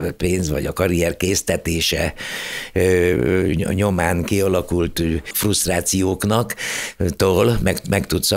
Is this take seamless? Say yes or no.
no